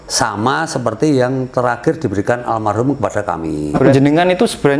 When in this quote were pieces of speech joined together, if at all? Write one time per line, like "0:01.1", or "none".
0:03.7